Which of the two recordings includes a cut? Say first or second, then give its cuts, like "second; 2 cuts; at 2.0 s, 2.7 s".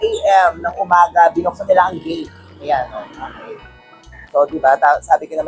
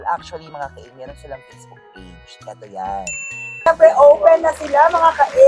second; 1 cut; at 3.7 s